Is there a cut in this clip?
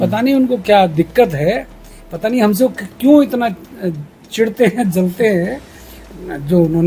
no; 0 cuts

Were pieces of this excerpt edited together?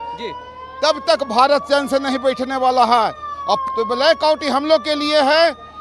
yes; 1 cut; at 3.6 s

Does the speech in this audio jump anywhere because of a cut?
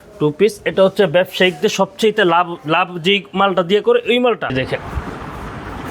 yes; 1 cut; at 4.5 s

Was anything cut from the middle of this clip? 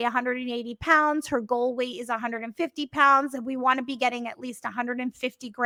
no; 0 cuts

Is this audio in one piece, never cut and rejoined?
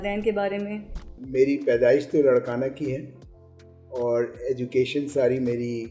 no; 1 cut; at 1.2 s

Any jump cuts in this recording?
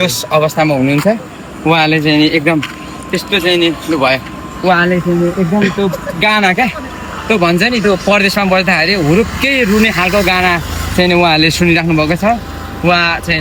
no; 0 cuts

